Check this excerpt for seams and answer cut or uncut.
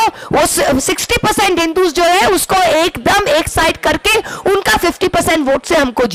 uncut